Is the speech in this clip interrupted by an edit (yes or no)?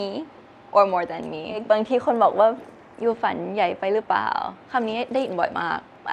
yes